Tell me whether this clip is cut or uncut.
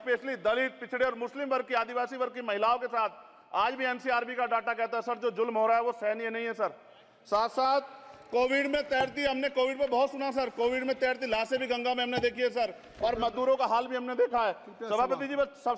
uncut